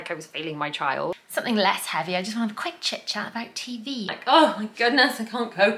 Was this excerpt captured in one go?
no; 2 cuts; at 1.2 s, 4.1 s

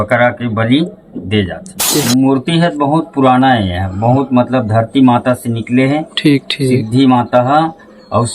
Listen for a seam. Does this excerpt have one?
yes; 1 cut; at 1.9 s

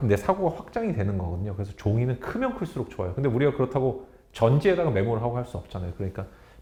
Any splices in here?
no; 0 cuts

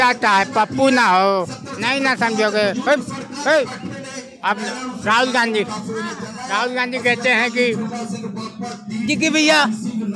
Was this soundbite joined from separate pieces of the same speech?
no; 0 cuts

